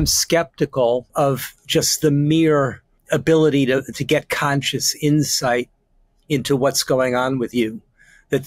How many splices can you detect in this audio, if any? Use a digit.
2